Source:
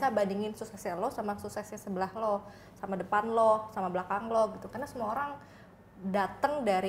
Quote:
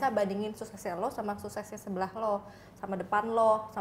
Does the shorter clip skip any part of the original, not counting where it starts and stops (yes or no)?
no